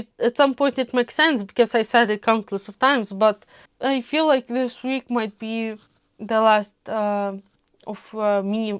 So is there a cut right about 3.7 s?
yes; 1 cut; at 3.7 s

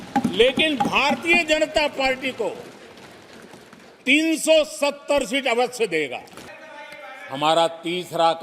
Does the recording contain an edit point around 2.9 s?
no; 1 cut; at 6.4 s

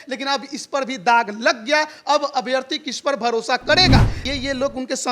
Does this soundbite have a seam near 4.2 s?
yes; 1 cut; at 4.2 s

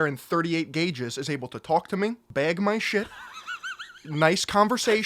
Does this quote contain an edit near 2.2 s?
yes; 1 cut; at 2.2 s

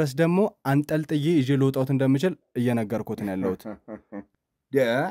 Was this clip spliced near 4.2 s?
yes; 1 cut; at 4.2 s

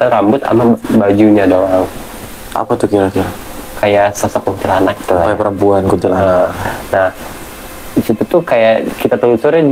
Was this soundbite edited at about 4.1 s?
no; 0 cuts

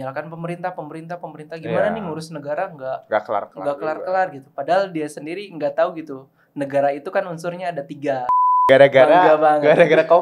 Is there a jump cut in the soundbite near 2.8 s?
no; 1 cut; at 8.5 s

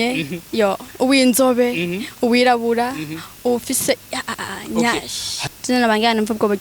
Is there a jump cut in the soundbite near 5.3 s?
yes; 1 cut; at 5.3 s

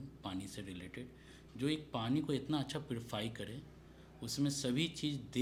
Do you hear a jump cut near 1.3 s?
no; 0 cuts

